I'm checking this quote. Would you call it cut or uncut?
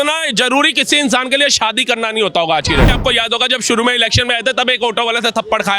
cut